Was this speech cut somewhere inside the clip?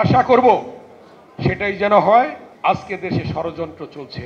yes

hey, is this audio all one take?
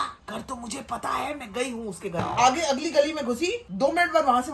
no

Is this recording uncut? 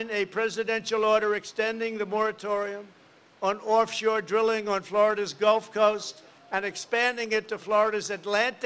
yes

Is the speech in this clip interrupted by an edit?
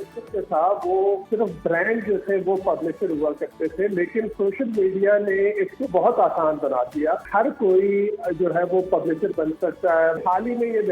yes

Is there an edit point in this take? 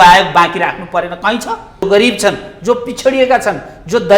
yes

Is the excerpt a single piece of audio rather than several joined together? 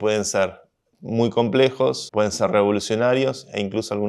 no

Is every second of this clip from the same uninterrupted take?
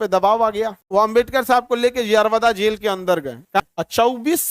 no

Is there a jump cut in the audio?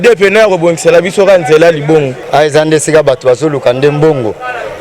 yes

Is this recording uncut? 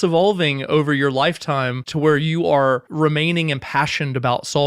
no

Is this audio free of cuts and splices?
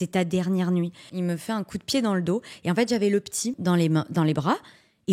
no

